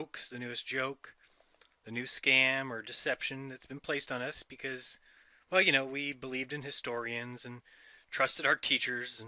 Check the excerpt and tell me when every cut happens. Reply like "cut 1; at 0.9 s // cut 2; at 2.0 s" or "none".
none